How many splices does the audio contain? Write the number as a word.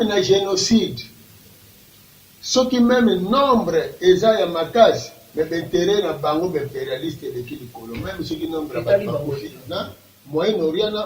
one